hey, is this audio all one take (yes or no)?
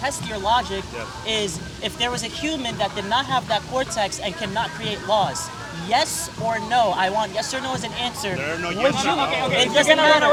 yes